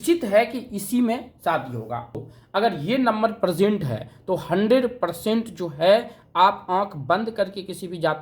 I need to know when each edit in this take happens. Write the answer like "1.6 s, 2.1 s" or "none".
2.2 s